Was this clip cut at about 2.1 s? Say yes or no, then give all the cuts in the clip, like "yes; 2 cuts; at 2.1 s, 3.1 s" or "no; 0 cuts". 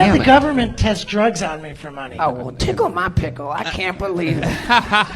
yes; 1 cut; at 2.1 s